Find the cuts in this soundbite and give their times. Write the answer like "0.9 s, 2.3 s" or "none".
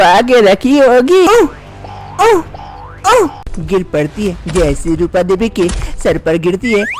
1.3 s, 3.6 s